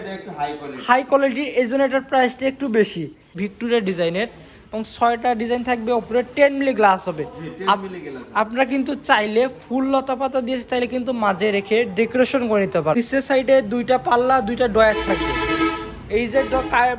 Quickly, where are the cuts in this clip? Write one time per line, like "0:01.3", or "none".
0:03.4
0:12.9